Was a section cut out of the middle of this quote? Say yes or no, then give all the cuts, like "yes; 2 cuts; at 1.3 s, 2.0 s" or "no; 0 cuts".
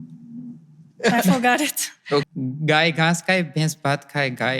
yes; 1 cut; at 2.2 s